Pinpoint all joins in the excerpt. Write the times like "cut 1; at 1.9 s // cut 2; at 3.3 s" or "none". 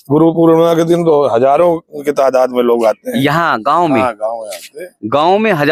none